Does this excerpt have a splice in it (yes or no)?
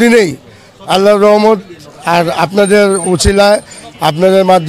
no